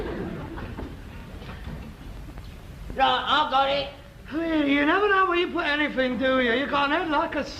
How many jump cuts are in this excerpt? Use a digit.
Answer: 1